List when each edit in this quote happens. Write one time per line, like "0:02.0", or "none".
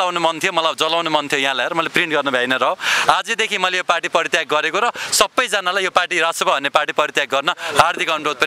none